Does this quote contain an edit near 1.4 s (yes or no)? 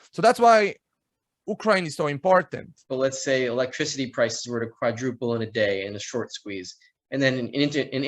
no